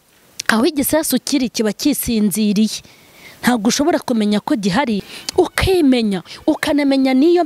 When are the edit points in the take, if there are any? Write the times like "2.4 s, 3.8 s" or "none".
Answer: 5.1 s